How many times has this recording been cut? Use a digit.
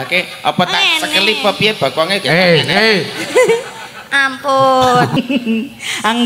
1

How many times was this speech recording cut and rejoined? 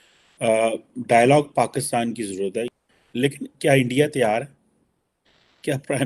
1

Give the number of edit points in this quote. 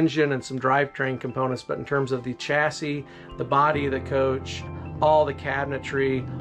1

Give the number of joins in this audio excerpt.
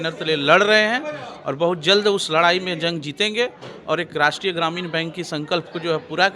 0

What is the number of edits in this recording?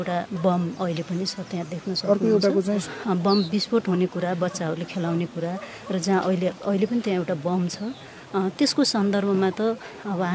1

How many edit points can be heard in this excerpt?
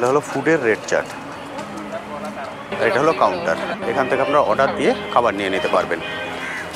0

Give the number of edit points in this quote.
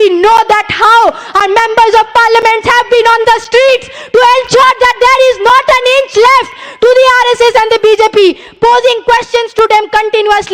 0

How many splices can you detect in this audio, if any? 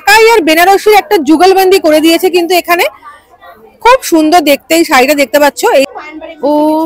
1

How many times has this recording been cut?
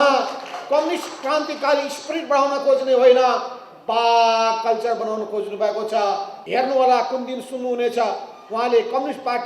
1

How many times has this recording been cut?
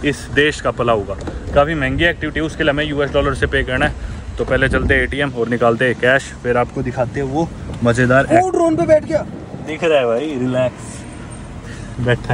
0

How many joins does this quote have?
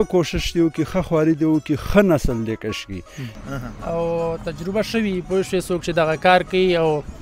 1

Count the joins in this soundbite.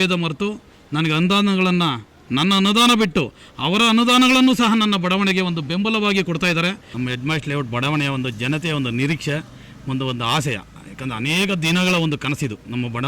1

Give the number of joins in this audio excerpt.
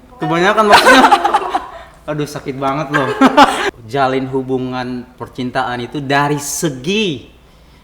1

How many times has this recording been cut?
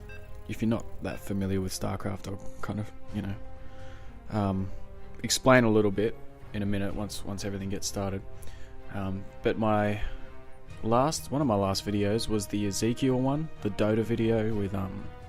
1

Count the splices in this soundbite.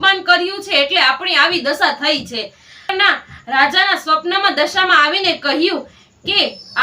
1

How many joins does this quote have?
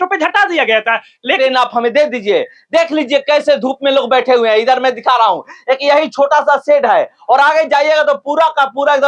1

